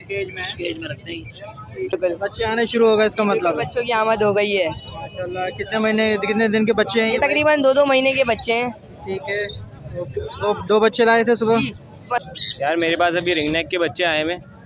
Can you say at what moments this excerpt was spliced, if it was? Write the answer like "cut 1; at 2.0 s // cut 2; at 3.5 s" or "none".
cut 1; at 1.9 s // cut 2; at 12.2 s